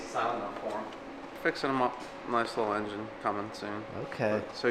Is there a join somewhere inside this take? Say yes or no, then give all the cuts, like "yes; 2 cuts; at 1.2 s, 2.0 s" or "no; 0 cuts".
yes; 1 cut; at 1.3 s